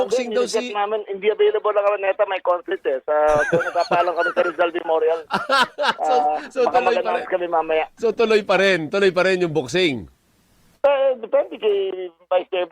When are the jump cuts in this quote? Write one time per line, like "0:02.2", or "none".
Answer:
0:08.0